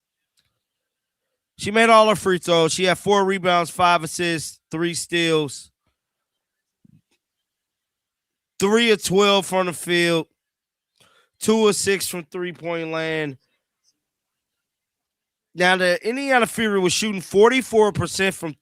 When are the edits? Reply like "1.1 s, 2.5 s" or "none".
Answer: 16.6 s